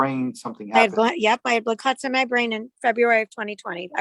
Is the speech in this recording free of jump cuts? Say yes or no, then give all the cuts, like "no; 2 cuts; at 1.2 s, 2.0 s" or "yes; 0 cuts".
yes; 0 cuts